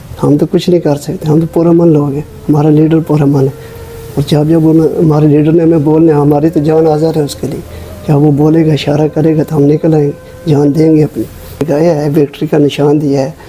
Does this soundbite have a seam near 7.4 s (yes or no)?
no